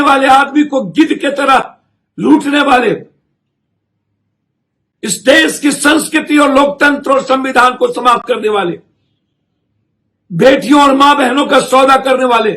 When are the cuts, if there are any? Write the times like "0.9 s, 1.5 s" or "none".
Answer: none